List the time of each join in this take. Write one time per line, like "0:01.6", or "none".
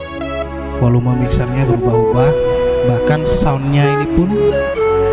none